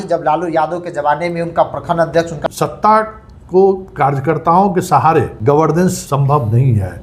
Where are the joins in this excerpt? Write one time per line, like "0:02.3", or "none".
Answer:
0:02.3
0:05.3
0:06.0